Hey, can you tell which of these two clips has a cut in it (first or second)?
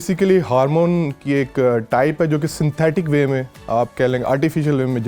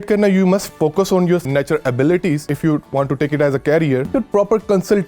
second